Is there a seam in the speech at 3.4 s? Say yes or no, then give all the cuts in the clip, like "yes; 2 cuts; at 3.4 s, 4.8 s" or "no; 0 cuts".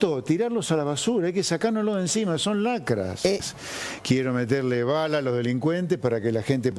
yes; 1 cut; at 3.4 s